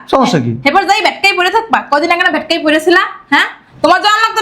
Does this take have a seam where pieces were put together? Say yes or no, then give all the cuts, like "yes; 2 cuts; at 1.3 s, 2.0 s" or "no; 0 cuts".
no; 0 cuts